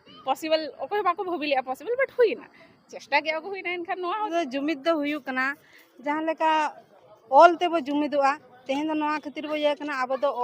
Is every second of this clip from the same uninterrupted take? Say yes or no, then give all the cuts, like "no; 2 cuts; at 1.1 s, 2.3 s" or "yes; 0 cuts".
no; 1 cut; at 4.3 s